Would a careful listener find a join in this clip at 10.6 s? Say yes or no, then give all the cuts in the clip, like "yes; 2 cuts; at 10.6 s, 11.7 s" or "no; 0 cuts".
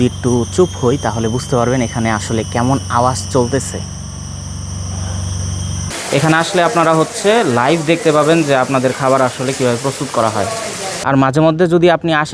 yes; 2 cuts; at 5.9 s, 10.6 s